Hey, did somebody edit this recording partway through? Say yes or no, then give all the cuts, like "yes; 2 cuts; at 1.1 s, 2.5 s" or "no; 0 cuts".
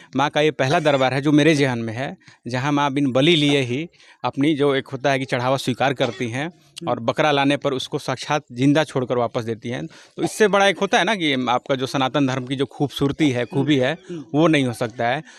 no; 0 cuts